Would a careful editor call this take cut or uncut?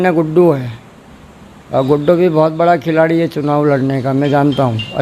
uncut